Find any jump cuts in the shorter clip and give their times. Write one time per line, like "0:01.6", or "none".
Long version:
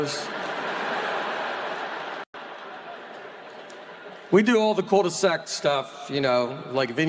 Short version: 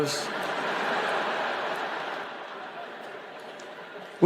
0:02.3